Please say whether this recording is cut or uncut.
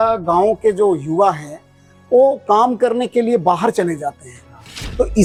uncut